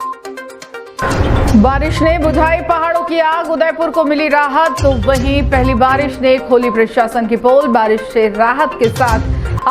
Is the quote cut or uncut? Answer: cut